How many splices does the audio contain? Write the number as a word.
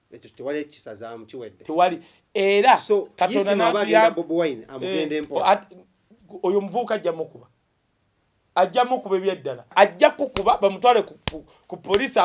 one